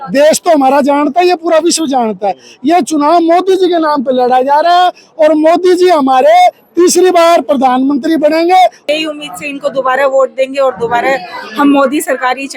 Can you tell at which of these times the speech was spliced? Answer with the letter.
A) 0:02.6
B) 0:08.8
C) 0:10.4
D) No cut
B